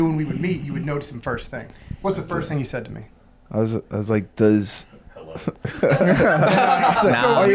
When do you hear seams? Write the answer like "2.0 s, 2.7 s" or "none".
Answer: none